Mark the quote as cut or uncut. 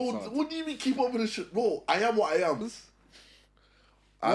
cut